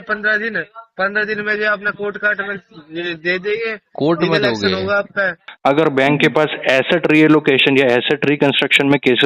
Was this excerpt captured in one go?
no; 1 cut; at 5.4 s

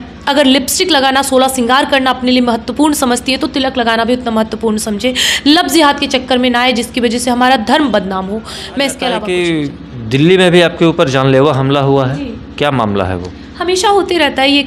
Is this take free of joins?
yes; 0 cuts

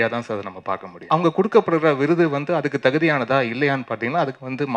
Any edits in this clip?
yes; 1 cut; at 1.0 s

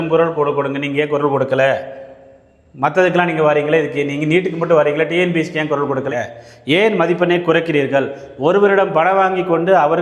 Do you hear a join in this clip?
yes; 1 cut; at 6.1 s

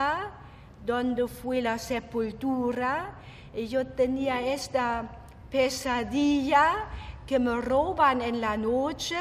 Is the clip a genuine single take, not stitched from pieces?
no; 1 cut; at 5.7 s

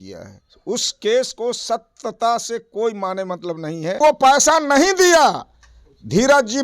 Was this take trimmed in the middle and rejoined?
yes; 1 cut; at 4.0 s

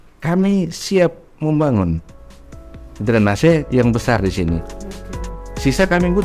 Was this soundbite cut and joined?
no; 0 cuts

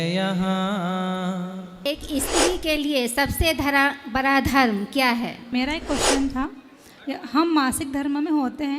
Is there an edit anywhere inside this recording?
yes; 2 cuts; at 1.8 s, 5.5 s

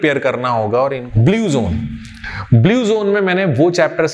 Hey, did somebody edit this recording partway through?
yes; 1 cut; at 1.0 s

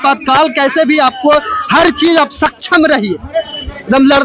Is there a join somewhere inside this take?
no; 0 cuts

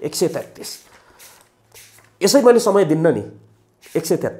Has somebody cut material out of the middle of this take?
no; 0 cuts

